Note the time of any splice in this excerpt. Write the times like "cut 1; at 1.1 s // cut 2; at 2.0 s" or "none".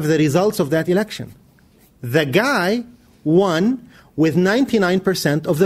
cut 1; at 2.9 s